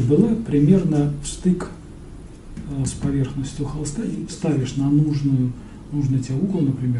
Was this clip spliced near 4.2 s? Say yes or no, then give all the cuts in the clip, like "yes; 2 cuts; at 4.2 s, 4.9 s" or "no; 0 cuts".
yes; 1 cut; at 4.2 s